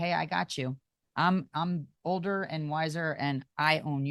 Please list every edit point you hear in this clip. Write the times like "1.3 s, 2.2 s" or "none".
none